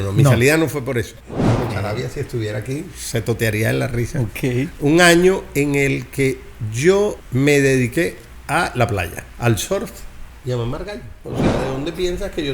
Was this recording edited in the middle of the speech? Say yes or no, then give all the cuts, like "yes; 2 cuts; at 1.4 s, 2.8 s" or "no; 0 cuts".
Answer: yes; 2 cuts; at 1.1 s, 11.2 s